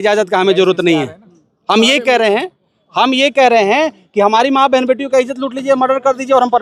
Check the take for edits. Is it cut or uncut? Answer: uncut